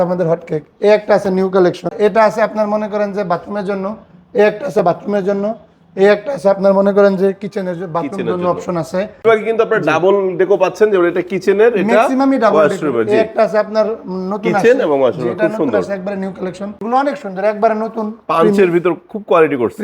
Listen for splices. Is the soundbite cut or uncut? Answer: cut